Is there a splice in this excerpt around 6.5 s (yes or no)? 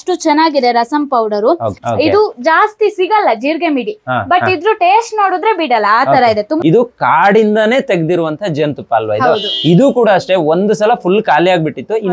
yes